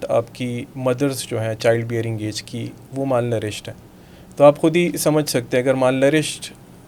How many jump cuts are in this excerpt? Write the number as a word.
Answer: zero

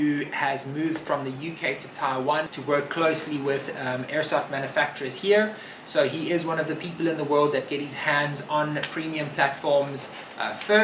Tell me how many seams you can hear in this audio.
one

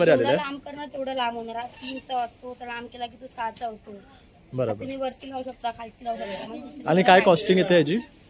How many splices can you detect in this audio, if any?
zero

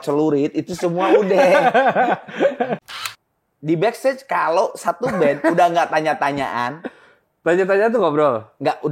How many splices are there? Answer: one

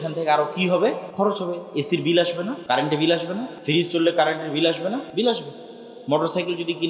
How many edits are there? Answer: four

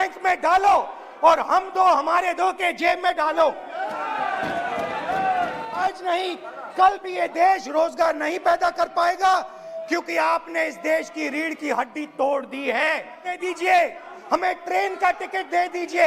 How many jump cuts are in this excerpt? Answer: two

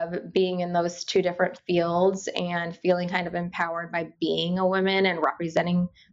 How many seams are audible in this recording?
zero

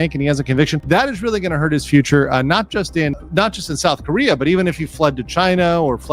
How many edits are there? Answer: zero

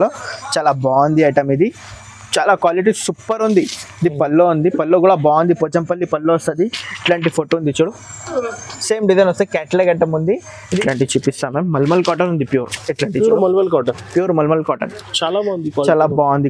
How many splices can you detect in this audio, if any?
one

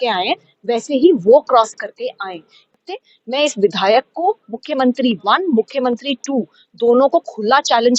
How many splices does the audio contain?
one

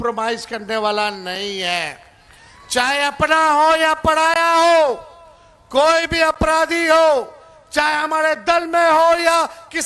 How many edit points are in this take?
zero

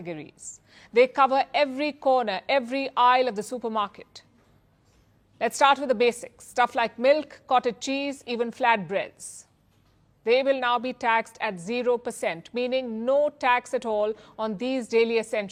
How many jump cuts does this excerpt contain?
zero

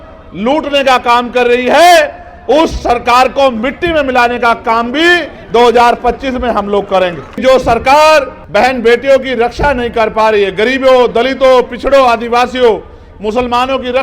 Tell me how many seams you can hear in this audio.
two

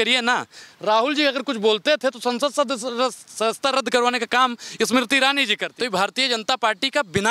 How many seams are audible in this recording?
one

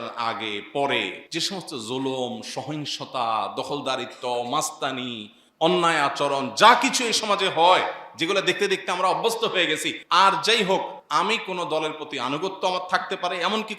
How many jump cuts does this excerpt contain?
three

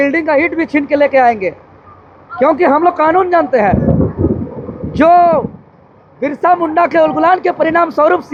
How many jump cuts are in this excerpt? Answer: zero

